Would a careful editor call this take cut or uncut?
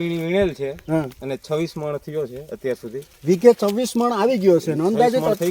uncut